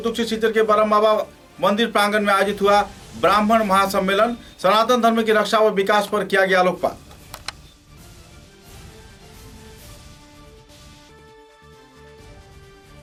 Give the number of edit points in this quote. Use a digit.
0